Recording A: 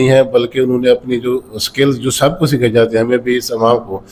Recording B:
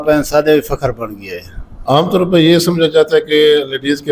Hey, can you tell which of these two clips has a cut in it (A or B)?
B